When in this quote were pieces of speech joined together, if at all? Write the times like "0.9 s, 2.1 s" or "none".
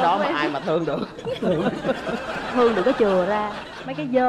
none